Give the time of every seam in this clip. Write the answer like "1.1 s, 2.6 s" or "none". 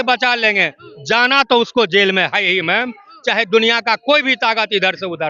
none

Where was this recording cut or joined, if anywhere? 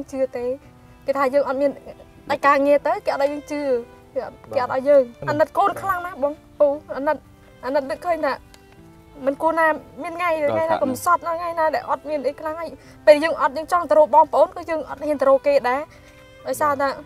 5.2 s

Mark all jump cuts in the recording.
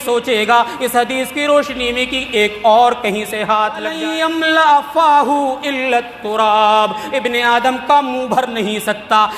4.0 s

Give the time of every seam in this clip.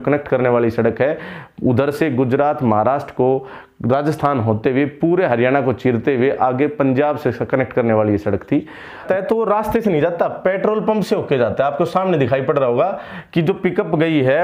9.0 s

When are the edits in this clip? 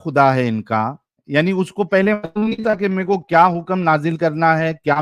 1.1 s

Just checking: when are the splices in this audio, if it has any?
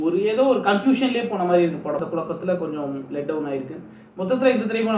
2.1 s

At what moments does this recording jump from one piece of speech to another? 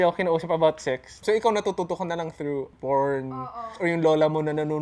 1.1 s, 2.7 s, 3.7 s

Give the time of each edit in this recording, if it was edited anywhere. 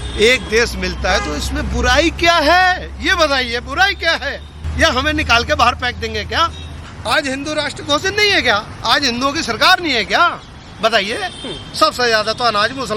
4.6 s, 6.9 s

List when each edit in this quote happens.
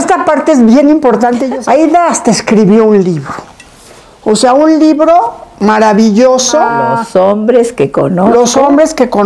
1.5 s, 6.7 s

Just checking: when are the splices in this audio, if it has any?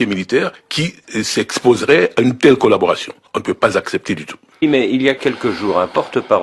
4.6 s

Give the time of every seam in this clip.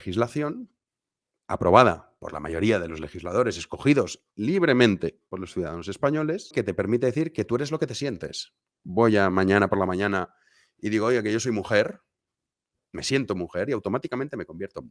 6.5 s, 8.8 s

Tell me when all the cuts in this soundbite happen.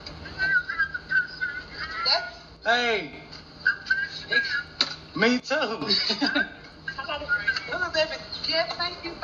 none

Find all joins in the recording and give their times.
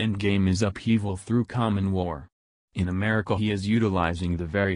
0.9 s

